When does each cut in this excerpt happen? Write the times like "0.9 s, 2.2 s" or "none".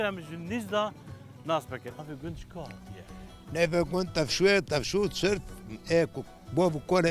2.0 s